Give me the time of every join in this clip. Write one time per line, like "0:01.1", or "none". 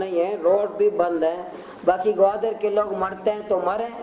0:01.6